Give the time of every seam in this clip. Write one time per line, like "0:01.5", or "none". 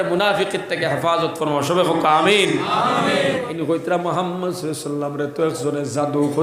0:03.5